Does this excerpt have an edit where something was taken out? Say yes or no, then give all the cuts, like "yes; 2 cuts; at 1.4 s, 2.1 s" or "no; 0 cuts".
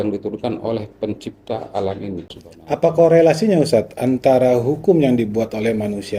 yes; 1 cut; at 2.3 s